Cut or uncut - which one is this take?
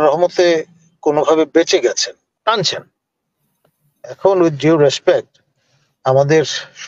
cut